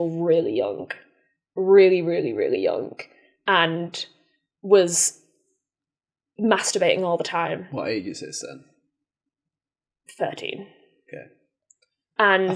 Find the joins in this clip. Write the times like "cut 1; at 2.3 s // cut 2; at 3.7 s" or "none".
none